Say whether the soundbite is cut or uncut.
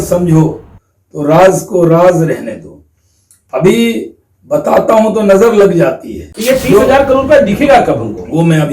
cut